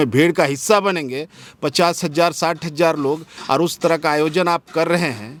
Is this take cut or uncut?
uncut